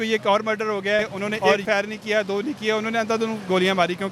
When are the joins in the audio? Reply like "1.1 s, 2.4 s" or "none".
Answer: 1.6 s